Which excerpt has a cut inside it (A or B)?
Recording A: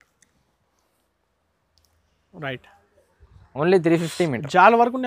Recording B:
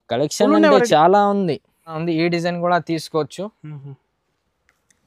B